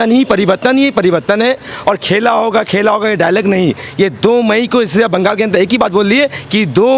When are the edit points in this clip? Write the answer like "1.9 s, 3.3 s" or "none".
none